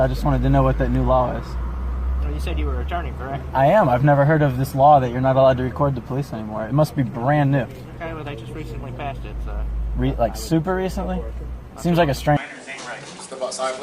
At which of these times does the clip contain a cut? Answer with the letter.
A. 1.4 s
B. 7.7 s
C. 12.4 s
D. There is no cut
C